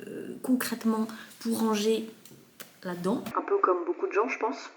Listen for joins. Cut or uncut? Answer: uncut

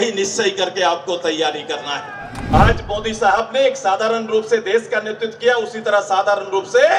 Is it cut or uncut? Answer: cut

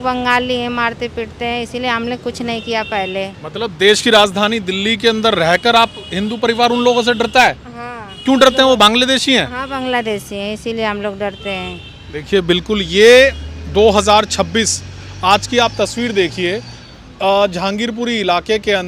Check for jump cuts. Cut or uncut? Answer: uncut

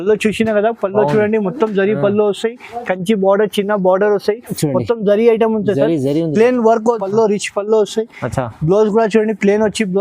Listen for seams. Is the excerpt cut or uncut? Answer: cut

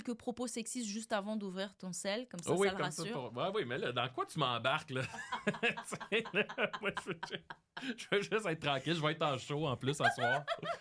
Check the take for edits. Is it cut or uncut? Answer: uncut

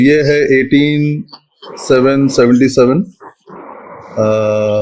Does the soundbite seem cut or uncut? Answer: uncut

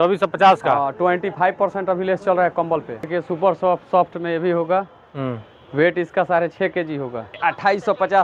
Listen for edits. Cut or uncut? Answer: cut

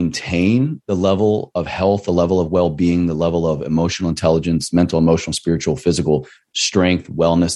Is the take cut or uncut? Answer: uncut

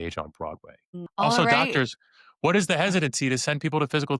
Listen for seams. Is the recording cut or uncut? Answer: cut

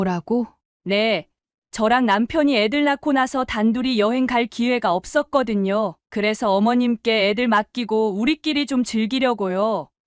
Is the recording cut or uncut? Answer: uncut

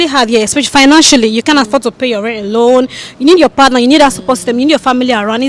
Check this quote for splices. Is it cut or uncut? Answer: uncut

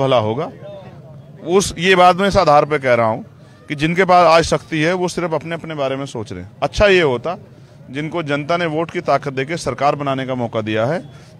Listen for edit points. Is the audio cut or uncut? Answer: uncut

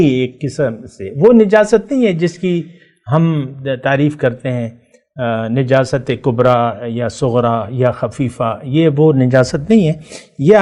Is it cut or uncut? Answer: uncut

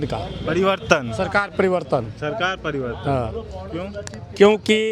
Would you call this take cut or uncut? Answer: uncut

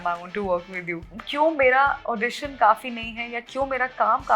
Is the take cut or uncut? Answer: cut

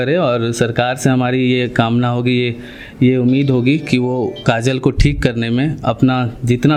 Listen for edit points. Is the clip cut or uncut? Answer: uncut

